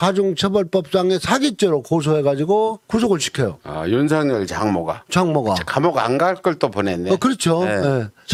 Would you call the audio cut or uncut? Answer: uncut